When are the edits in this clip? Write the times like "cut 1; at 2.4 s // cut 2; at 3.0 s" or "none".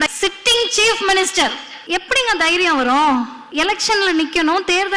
cut 1; at 1.7 s // cut 2; at 3.4 s

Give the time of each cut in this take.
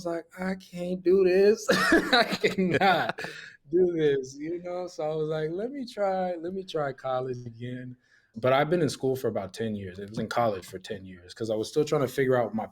cut 1; at 8.3 s

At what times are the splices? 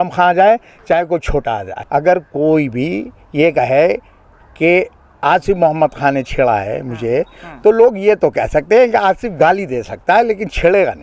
cut 1; at 1.7 s

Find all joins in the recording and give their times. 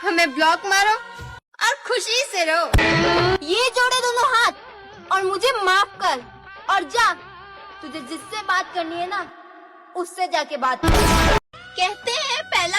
cut 1; at 2.8 s // cut 2; at 11.7 s

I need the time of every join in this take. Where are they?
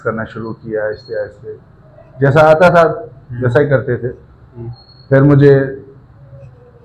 none

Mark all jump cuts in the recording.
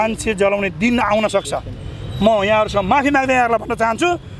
none

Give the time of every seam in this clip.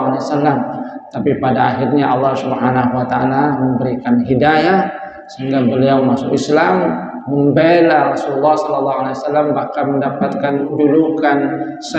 cut 1; at 10.7 s

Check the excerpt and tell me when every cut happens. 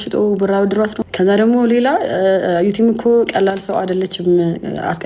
cut 1; at 1.0 s

